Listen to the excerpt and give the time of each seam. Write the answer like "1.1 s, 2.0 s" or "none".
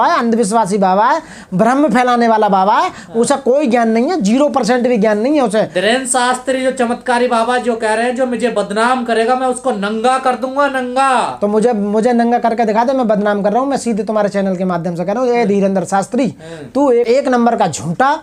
none